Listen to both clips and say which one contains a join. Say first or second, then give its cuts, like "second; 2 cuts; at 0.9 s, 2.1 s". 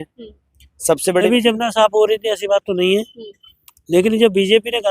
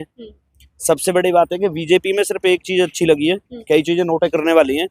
first; 1 cut; at 1.3 s